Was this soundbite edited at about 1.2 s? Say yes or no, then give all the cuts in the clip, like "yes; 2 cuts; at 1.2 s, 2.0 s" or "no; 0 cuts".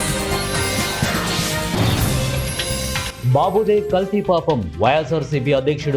no; 1 cut; at 2.8 s